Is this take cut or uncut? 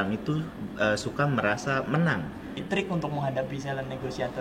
cut